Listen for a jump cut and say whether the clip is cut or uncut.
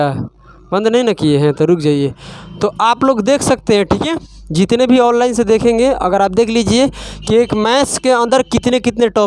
uncut